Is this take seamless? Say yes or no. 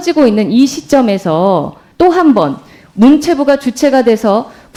yes